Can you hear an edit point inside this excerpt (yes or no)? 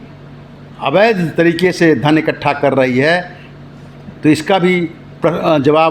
no